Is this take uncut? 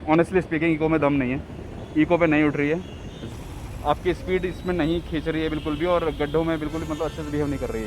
no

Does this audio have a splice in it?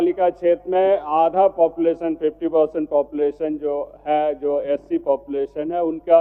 no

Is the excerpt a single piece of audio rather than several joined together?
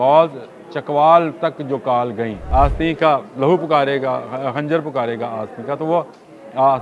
no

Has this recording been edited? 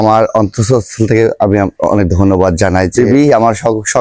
yes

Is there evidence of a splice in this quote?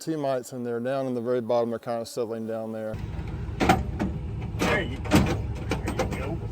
yes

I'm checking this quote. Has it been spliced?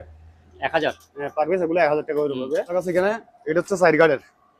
yes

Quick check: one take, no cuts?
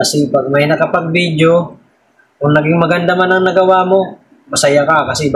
yes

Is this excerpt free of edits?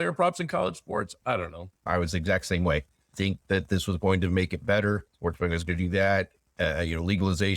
no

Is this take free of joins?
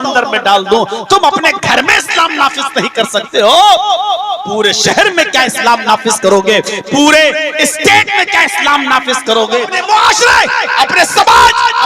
no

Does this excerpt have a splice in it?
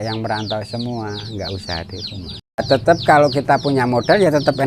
yes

